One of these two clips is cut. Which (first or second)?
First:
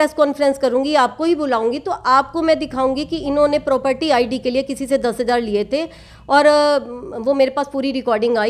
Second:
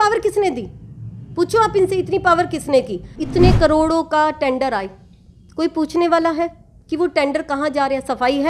second